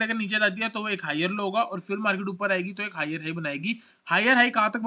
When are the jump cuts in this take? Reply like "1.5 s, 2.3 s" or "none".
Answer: none